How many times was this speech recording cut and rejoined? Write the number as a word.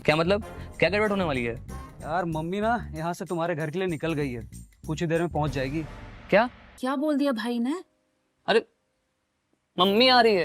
one